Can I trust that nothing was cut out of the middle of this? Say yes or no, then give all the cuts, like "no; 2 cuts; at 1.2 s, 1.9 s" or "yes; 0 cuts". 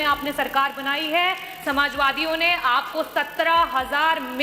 yes; 0 cuts